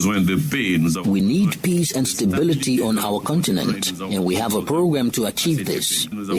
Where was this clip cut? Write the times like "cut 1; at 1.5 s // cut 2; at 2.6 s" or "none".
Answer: none

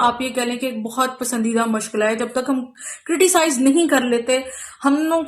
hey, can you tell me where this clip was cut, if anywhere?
none

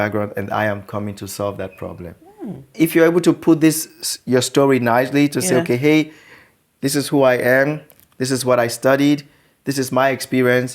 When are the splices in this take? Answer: cut 1; at 2.7 s

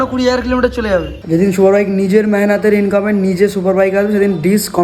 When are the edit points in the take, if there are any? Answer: cut 1; at 1.2 s

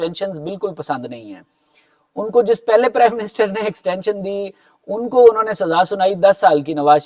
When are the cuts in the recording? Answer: none

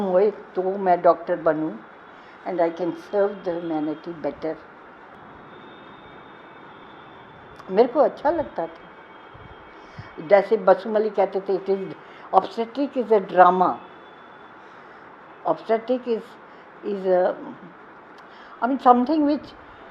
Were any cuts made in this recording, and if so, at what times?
cut 1; at 5.1 s

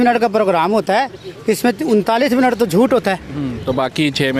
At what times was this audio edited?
none

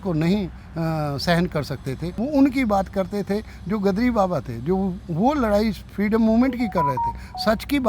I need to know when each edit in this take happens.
cut 1; at 2.1 s

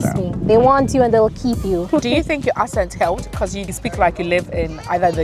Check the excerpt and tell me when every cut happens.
cut 1; at 1.9 s // cut 2; at 3.6 s

